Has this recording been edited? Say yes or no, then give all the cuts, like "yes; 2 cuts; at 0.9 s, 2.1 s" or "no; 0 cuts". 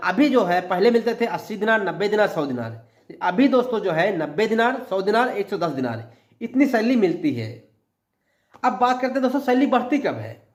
no; 0 cuts